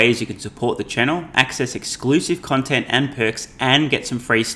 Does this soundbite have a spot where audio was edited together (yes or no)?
no